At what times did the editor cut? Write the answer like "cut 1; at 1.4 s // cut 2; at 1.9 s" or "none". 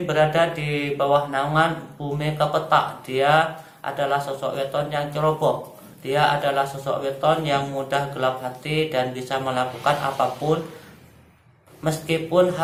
none